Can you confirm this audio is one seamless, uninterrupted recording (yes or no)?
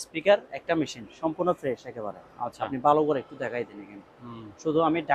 yes